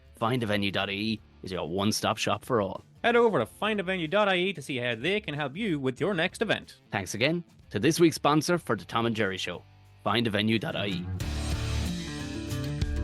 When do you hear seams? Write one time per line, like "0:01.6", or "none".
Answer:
0:11.0